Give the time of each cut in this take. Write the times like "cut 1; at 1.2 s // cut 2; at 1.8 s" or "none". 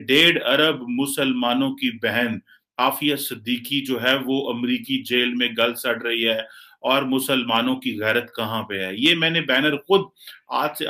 none

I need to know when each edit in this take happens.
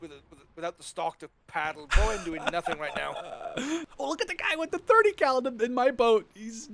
cut 1; at 3.9 s

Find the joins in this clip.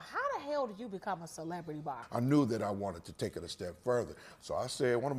cut 1; at 2.0 s

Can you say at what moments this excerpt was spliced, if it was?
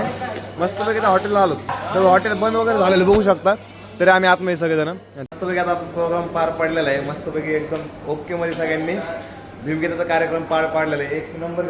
cut 1; at 1.8 s // cut 2; at 5.2 s

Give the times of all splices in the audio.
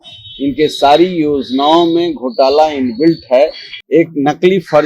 cut 1; at 3.7 s

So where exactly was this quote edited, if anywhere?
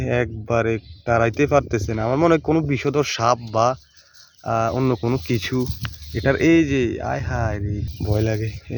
cut 1; at 7.7 s

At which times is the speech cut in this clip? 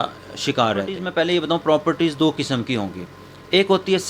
cut 1; at 1.0 s

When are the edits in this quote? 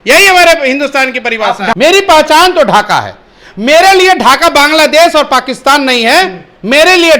cut 1; at 1.7 s

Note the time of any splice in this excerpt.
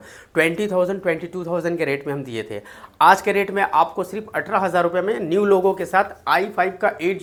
none

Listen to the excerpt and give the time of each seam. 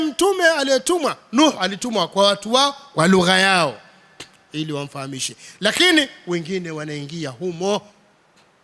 none

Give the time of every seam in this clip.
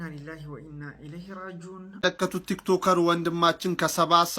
cut 1; at 2.0 s

